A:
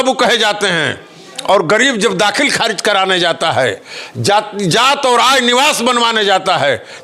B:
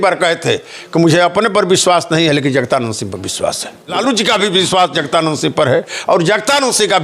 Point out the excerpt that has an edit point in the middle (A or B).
B